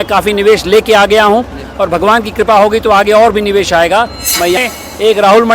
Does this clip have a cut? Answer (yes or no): yes